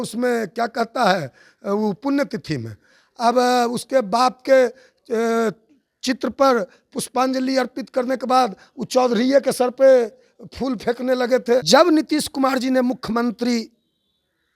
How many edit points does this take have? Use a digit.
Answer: 1